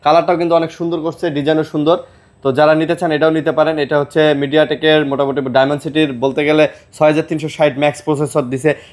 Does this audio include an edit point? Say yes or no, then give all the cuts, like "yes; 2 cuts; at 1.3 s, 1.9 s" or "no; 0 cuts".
no; 0 cuts